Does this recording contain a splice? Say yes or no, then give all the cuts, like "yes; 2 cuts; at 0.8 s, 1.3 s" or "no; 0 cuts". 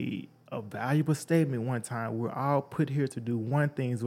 no; 0 cuts